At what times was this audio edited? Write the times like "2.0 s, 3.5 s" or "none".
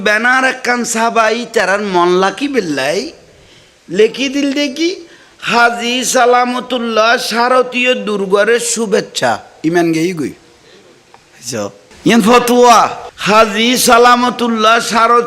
11.9 s